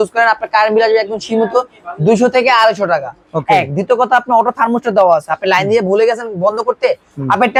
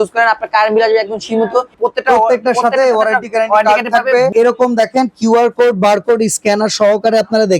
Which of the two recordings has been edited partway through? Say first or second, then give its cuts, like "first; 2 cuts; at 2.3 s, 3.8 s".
second; 2 cuts; at 1.7 s, 4.3 s